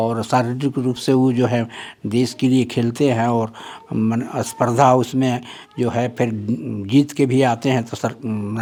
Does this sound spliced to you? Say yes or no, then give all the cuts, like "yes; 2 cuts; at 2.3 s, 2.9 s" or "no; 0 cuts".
no; 0 cuts